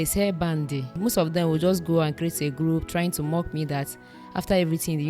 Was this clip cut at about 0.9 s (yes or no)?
yes